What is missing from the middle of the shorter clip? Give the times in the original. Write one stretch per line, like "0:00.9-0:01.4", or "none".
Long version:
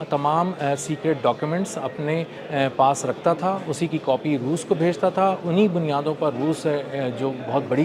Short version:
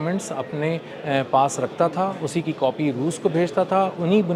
none